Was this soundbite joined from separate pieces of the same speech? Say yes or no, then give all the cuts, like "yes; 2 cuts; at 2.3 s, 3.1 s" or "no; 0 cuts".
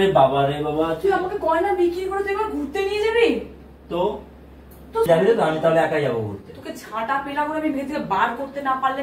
yes; 1 cut; at 5.1 s